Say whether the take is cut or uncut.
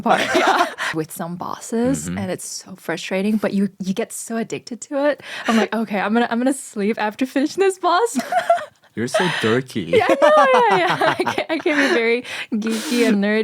cut